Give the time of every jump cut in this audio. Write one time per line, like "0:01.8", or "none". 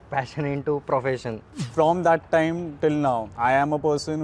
0:01.6
0:03.3